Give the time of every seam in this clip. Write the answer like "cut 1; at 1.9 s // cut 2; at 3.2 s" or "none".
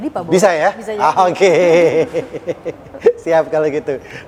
none